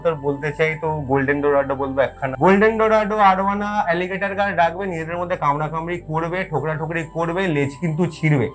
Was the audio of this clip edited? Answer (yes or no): yes